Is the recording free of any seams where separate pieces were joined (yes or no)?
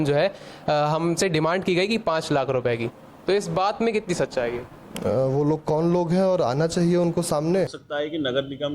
no